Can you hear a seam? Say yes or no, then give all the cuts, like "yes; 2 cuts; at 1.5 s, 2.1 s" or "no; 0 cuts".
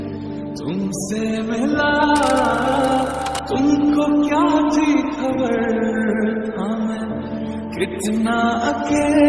no; 0 cuts